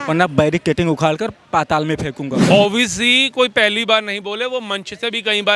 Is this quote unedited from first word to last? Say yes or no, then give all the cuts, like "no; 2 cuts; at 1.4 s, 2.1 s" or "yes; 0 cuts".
no; 1 cut; at 2.4 s